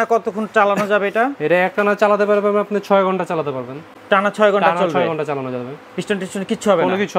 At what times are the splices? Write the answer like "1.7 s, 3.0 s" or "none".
none